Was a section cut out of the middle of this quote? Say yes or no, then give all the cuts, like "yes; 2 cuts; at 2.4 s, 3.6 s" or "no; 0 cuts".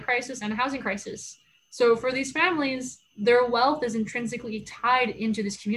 no; 0 cuts